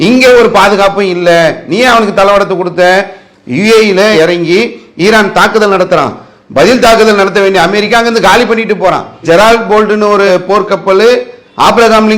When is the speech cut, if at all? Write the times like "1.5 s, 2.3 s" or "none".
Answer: 9.1 s